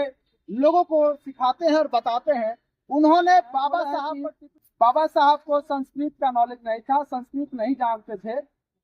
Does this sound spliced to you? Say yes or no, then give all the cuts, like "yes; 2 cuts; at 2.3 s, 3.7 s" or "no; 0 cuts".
yes; 1 cut; at 4.1 s